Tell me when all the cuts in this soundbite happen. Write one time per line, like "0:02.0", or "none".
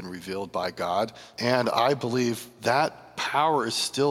0:01.2
0:02.5
0:03.1